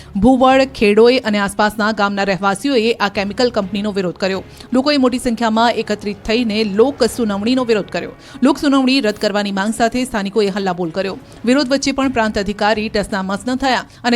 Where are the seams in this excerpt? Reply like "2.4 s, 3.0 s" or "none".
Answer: 7.1 s